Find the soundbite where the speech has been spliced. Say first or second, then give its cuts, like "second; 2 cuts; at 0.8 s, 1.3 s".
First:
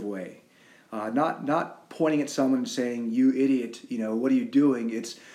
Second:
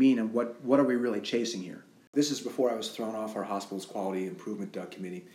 second; 1 cut; at 2.1 s